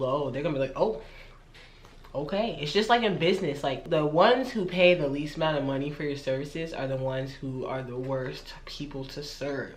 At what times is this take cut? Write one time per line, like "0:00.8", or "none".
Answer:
0:03.8